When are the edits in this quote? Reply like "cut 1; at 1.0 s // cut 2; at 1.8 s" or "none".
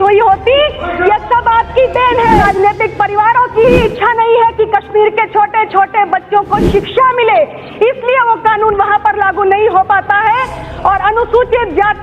cut 1; at 2.4 s